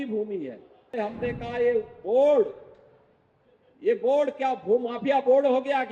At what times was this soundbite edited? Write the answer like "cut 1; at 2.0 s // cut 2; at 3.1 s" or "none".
cut 1; at 0.9 s